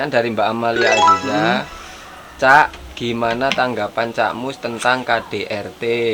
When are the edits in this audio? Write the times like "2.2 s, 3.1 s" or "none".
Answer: none

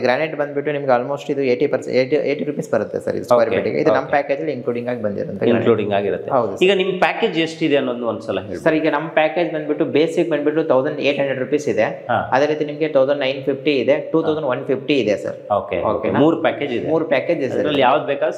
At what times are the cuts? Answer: none

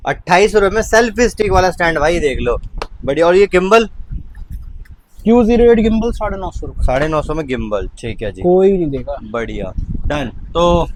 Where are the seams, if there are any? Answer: none

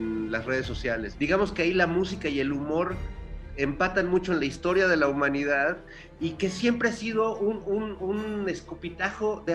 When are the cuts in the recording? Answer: 1.1 s

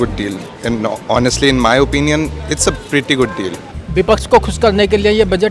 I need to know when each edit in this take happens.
3.6 s

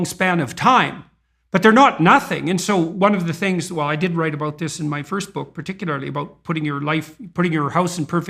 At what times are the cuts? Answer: none

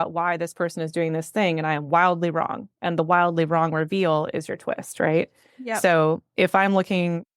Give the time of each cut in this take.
none

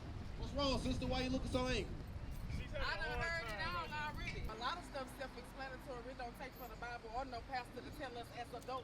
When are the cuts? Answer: 4.5 s

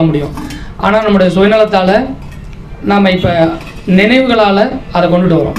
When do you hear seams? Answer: none

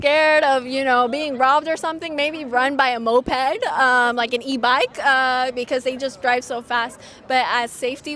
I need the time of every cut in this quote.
none

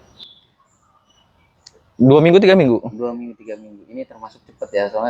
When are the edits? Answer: none

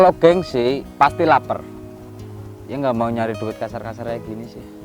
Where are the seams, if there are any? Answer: 2.0 s

